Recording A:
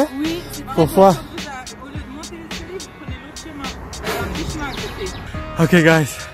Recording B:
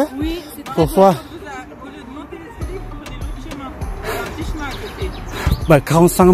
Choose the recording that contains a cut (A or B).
A